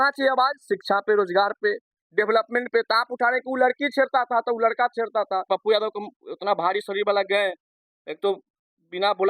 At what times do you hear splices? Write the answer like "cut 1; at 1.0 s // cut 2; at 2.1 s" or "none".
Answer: cut 1; at 5.5 s